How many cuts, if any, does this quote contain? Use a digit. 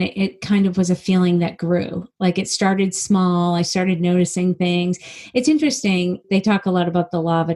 1